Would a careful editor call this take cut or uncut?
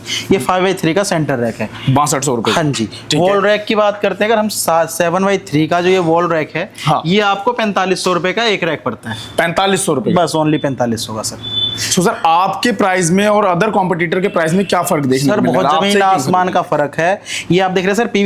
uncut